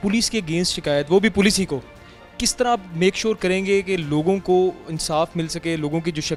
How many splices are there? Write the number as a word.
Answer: zero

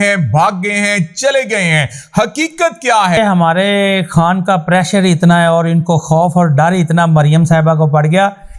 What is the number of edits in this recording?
one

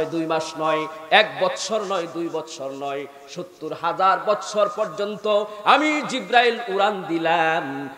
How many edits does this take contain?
zero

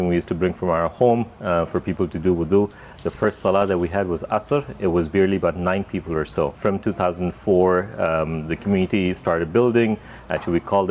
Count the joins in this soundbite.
zero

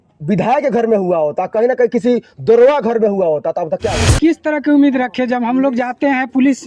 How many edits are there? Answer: one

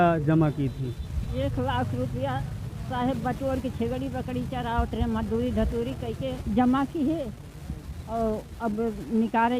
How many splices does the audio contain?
one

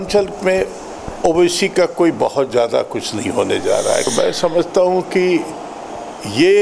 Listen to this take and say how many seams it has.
one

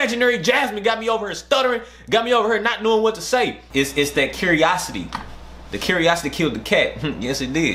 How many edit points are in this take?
one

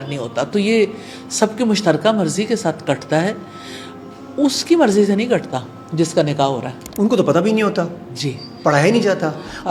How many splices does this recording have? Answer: zero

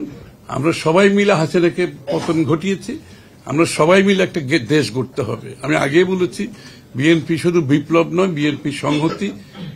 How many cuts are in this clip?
zero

